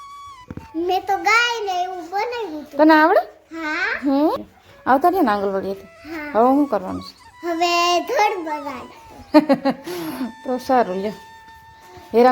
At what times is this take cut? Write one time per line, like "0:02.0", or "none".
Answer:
0:04.4